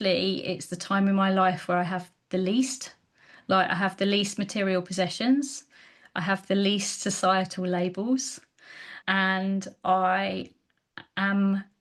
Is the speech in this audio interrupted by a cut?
no; 0 cuts

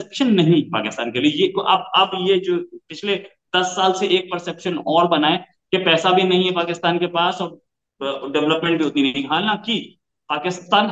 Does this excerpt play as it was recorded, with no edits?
yes; 0 cuts

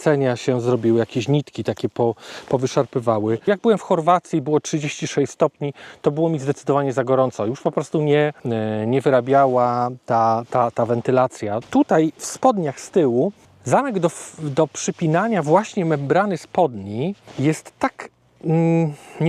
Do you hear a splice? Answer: yes; 5 cuts; at 3.4 s, 8.4 s, 11.6 s, 13.5 s, 17.2 s

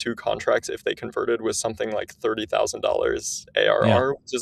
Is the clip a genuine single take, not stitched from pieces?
yes; 0 cuts

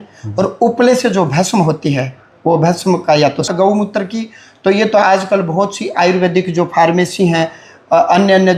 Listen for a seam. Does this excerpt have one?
yes; 1 cut; at 3.5 s

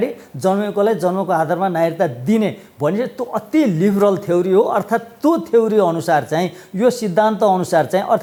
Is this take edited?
no; 0 cuts

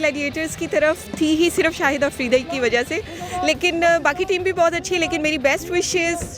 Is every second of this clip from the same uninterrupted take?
yes; 0 cuts

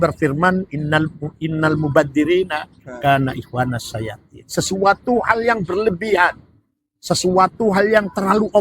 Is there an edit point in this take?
no; 0 cuts

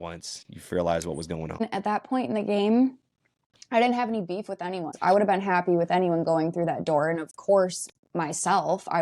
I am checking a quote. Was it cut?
yes; 2 cuts; at 1.6 s, 4.9 s

